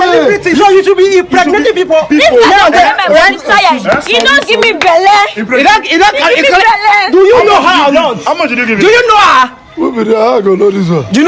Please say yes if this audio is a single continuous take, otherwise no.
yes